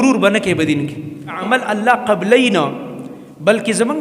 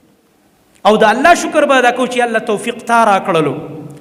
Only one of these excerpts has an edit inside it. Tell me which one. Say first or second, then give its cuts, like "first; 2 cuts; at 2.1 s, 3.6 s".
first; 1 cut; at 1.4 s